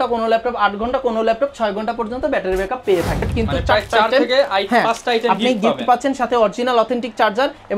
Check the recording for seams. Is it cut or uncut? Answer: cut